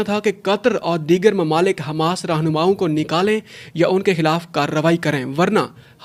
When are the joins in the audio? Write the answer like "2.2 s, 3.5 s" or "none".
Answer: none